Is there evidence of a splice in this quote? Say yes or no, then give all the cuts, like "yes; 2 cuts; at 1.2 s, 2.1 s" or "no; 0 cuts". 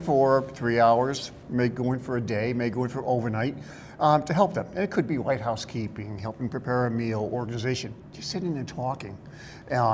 no; 0 cuts